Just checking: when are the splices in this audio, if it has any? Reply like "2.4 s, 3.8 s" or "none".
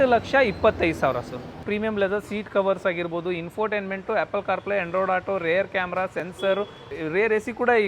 1.6 s, 6.9 s

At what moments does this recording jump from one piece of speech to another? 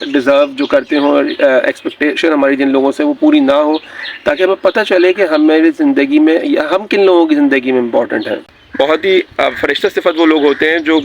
8.6 s

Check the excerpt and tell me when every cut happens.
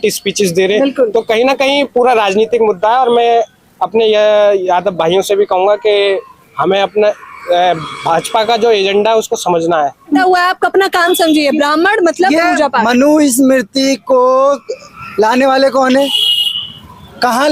10.2 s

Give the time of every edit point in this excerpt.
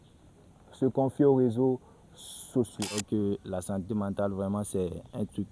3.0 s

